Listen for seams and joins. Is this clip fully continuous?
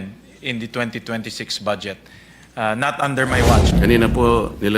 no; 1 cut; at 3.7 s

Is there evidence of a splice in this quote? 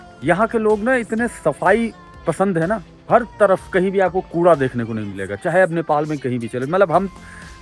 no; 0 cuts

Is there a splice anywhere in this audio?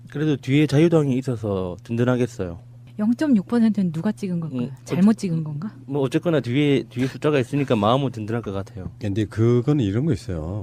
yes; 1 cut; at 1.1 s

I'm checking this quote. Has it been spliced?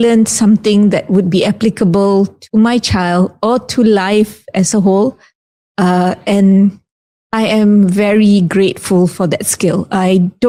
no; 0 cuts

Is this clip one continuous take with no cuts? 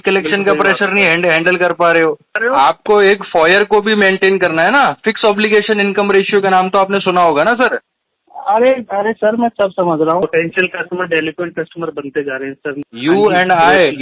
no; 3 cuts; at 2.4 s, 10.2 s, 12.8 s

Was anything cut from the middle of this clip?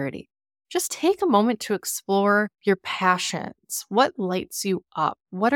no; 0 cuts

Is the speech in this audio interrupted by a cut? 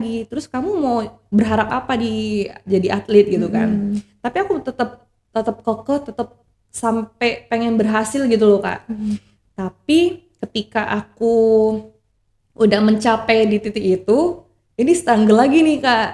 no; 0 cuts

